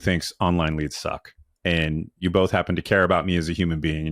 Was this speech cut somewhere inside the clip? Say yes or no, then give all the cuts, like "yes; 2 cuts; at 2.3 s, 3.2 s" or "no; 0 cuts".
yes; 1 cut; at 2.2 s